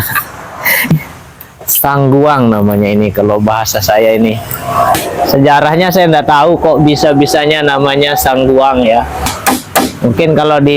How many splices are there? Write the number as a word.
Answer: three